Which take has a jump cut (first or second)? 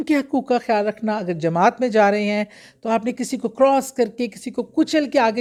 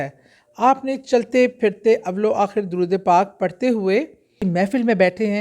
second